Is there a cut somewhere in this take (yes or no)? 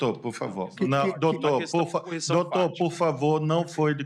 no